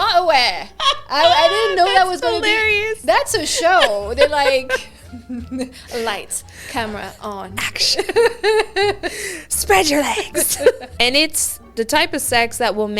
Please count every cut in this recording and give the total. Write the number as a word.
one